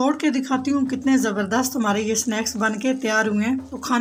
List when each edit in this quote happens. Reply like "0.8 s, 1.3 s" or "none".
none